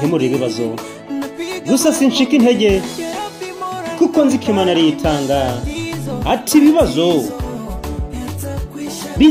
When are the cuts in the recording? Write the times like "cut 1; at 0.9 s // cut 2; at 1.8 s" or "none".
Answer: none